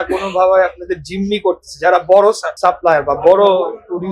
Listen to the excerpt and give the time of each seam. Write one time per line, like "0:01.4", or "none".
0:02.5

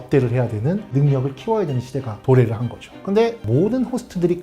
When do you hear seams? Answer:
0:00.9
0:03.1

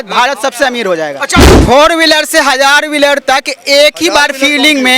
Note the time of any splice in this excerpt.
0:01.5

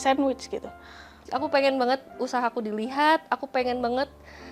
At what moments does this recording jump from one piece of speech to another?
0:01.2

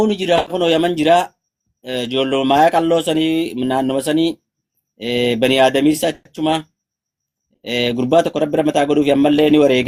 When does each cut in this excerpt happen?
none

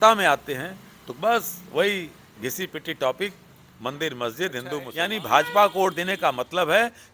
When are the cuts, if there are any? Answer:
0:04.9

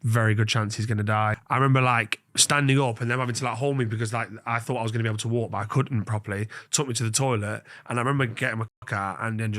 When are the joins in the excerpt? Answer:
0:01.4

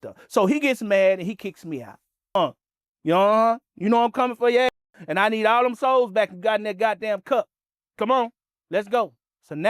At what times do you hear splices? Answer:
0:02.3

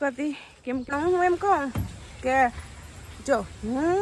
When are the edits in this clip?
0:00.9

